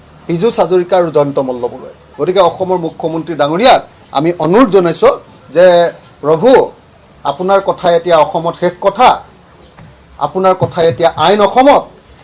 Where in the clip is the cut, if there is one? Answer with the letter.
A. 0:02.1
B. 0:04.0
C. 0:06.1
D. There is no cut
A